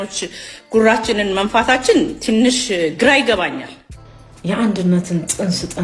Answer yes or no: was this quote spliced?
yes